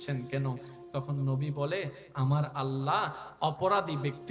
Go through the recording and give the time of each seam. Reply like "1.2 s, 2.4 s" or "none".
3.2 s